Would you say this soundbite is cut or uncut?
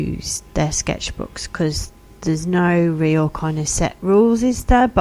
uncut